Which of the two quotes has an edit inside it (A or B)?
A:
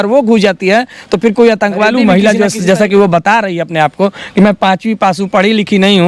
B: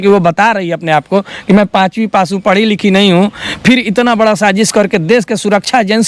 A